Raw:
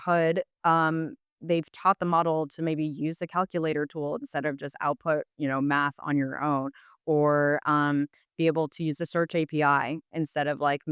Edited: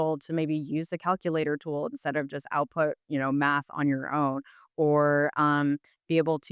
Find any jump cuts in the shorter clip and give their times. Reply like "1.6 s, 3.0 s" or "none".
none